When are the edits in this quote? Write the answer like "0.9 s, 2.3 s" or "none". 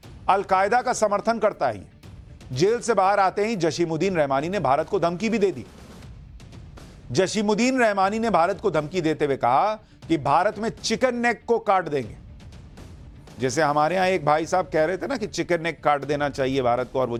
none